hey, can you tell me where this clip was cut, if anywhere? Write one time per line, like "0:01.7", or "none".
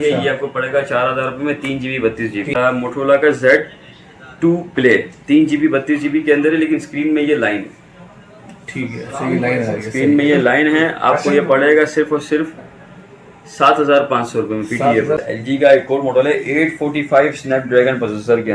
0:02.6
0:15.2